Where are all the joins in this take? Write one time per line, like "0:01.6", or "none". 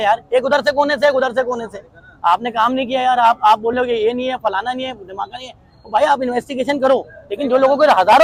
none